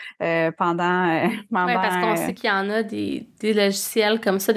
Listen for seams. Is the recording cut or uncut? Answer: cut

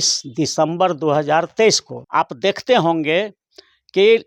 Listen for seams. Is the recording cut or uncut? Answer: cut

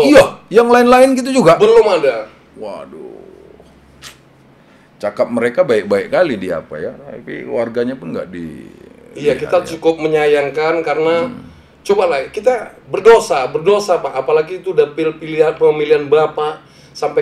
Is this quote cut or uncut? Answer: uncut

